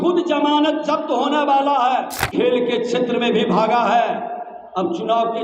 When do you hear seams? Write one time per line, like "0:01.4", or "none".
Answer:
0:02.2